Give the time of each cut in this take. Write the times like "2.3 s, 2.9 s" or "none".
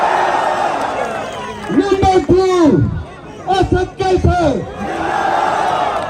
none